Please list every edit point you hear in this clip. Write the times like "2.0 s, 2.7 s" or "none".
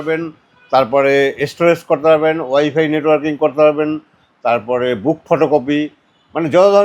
none